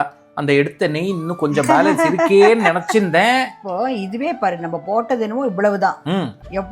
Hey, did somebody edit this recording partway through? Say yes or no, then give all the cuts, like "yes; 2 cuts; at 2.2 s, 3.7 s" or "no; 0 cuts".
yes; 1 cut; at 3.6 s